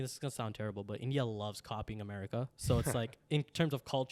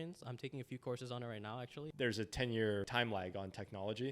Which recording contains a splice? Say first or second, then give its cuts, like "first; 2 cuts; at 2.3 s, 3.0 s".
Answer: second; 2 cuts; at 1.8 s, 2.9 s